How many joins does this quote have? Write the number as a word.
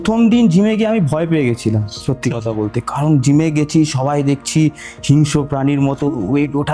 zero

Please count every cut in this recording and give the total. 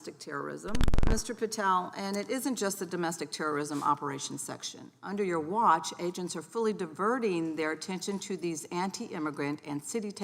one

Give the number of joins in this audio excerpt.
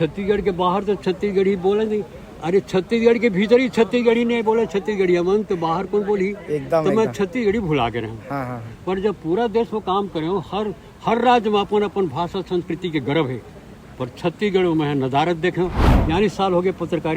one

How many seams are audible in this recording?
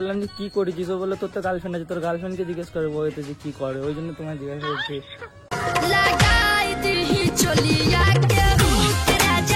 zero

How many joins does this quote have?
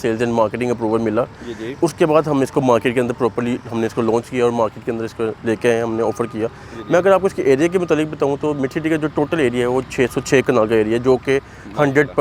zero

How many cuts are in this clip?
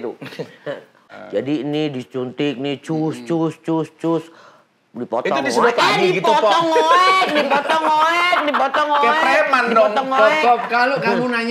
one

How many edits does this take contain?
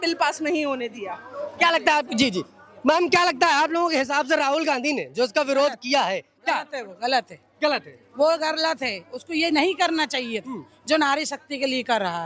zero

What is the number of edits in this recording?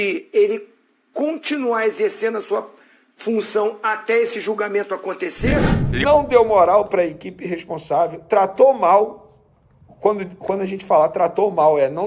one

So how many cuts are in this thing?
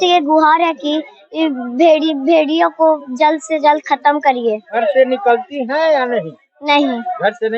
one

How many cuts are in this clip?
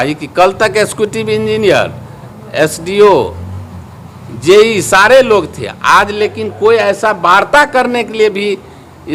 zero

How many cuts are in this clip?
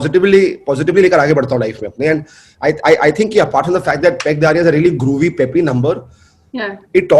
zero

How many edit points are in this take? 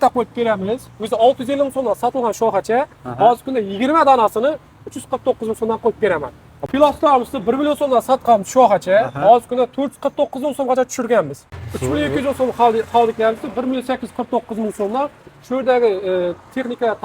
two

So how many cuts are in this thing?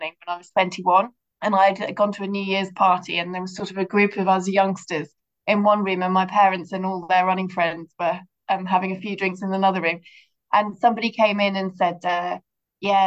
one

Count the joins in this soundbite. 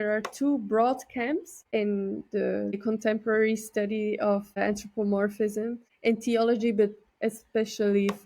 four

